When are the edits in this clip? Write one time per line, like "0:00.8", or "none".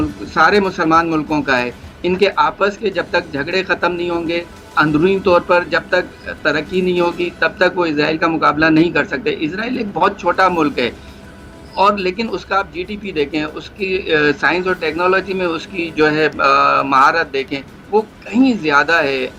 none